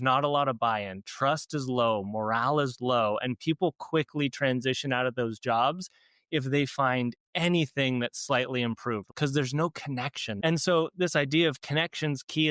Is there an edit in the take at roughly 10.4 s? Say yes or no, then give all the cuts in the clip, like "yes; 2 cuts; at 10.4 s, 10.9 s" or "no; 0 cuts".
yes; 2 cuts; at 9.0 s, 10.4 s